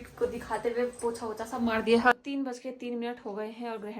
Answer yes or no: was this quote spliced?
yes